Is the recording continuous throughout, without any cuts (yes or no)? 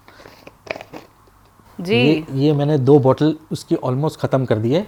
yes